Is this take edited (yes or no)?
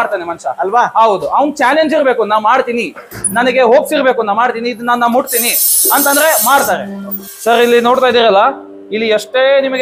yes